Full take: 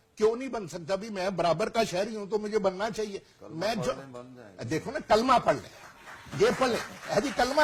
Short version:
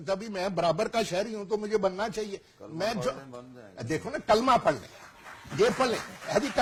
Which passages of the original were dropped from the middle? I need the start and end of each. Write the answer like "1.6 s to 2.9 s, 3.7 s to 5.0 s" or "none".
none